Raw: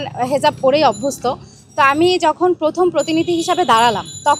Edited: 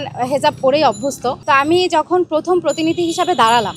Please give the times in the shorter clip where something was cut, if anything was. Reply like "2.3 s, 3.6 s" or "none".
1.3 s